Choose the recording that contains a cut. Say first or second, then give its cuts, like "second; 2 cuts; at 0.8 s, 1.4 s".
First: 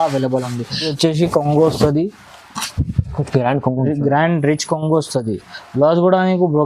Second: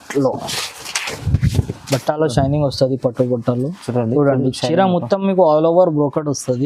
first; 1 cut; at 0.9 s